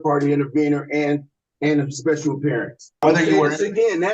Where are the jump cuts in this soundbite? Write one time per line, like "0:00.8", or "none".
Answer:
0:03.0